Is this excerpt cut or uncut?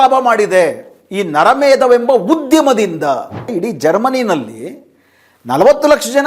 cut